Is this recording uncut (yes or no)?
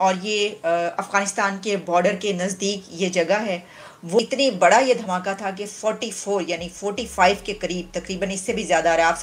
no